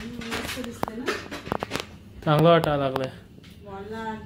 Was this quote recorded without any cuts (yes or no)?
yes